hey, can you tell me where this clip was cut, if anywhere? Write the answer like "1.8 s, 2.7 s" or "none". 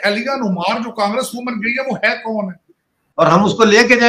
3.0 s